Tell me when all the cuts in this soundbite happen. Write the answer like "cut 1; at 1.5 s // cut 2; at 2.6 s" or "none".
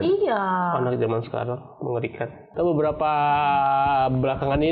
cut 1; at 2.4 s